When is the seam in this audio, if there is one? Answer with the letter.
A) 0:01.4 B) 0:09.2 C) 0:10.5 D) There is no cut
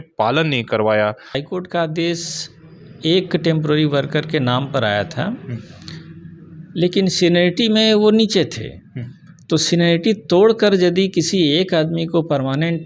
A